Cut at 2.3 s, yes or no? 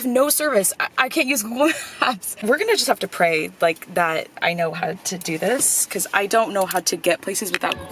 yes